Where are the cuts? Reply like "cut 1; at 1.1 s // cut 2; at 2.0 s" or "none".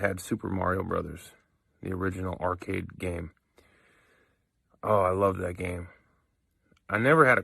cut 1; at 1.7 s // cut 2; at 2.9 s